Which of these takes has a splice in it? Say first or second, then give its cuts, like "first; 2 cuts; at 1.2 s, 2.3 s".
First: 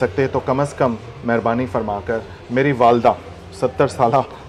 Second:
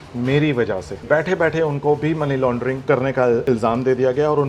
second; 3 cuts; at 1.0 s, 2.8 s, 3.4 s